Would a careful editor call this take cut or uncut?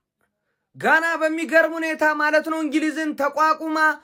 uncut